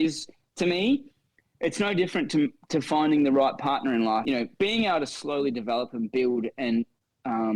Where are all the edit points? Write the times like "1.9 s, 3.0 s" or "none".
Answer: 4.2 s